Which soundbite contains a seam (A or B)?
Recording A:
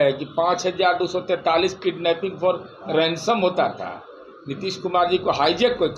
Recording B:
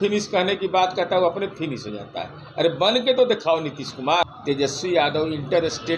B